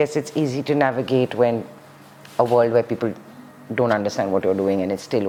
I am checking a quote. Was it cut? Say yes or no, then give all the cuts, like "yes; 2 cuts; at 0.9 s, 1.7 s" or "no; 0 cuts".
no; 0 cuts